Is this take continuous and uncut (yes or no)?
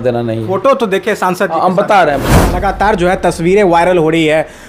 no